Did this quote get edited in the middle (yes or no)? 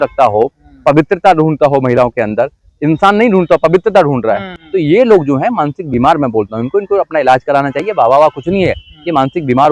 yes